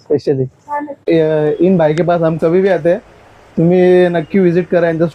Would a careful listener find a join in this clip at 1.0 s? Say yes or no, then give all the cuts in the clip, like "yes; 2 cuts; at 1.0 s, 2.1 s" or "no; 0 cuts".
yes; 1 cut; at 1.0 s